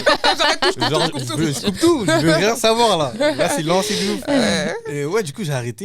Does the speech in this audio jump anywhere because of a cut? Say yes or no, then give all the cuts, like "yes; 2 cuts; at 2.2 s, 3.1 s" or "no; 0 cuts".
no; 0 cuts